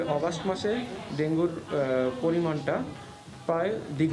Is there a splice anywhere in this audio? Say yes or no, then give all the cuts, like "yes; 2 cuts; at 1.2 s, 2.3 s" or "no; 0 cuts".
no; 0 cuts